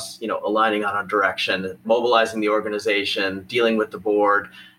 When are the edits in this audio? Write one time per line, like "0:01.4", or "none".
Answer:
0:01.8